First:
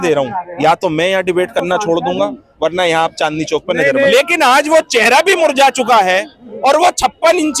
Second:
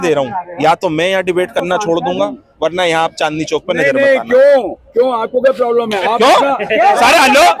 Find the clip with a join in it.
first; 1 cut; at 4.2 s

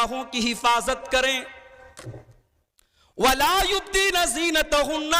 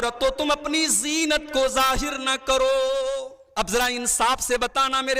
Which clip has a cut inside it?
second; 1 cut; at 3.4 s

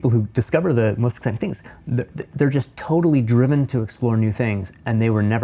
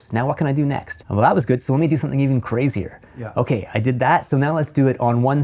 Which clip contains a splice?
second; 1 cut; at 0.9 s

